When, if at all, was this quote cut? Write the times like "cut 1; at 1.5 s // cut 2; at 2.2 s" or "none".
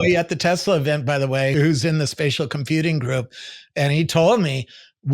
cut 1; at 1.5 s